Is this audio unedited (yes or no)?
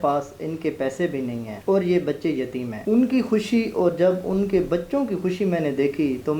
no